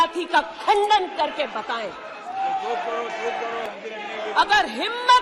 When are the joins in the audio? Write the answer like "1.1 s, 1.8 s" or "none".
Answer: 3.6 s